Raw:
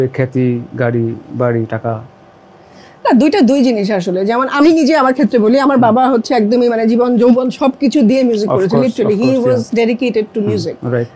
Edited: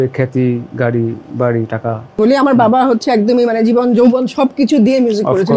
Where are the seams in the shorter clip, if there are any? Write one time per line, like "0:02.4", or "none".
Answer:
0:02.2